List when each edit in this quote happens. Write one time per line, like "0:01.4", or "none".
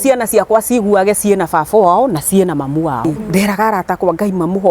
0:03.0